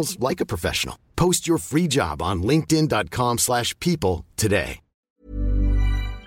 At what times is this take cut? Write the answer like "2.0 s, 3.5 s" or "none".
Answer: 5.1 s

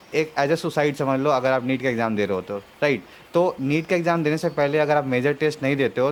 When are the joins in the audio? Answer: none

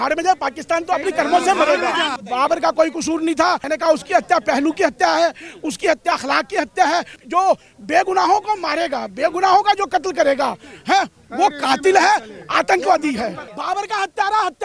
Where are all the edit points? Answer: 2.1 s, 3.6 s, 7.2 s, 13.5 s

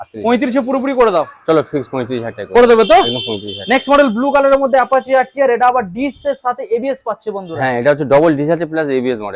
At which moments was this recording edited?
none

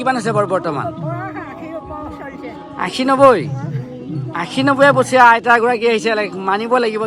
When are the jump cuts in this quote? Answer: none

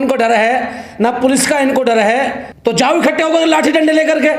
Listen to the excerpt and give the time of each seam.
2.4 s

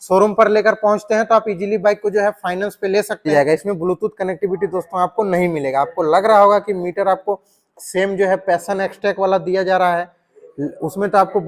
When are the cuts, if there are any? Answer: 3.3 s

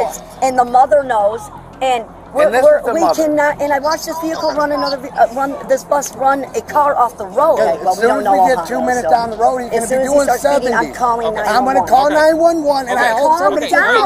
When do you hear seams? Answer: 7.6 s

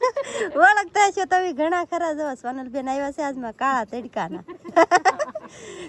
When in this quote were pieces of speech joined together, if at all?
none

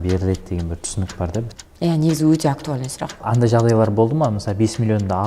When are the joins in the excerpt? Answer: 1.6 s, 3.2 s

